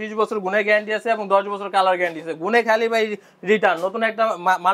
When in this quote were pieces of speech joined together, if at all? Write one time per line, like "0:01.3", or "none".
none

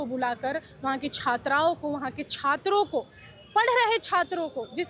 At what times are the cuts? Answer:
none

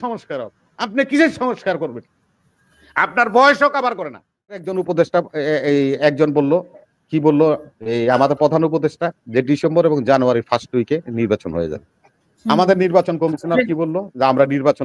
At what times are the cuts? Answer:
0:04.7

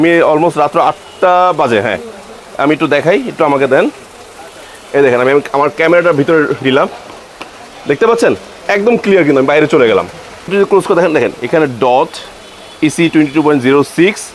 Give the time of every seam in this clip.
0:10.5

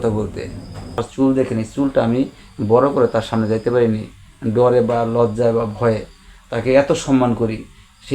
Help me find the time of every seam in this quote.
0:01.0

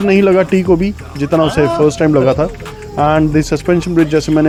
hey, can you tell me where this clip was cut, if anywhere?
none

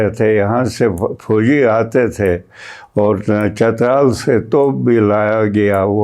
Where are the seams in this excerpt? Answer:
none

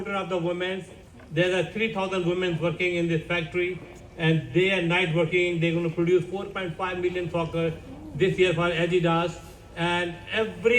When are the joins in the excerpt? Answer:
none

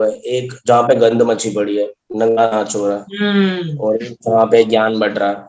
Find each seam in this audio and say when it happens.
none

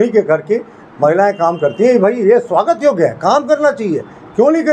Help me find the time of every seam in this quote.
none

